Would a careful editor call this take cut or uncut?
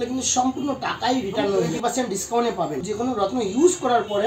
cut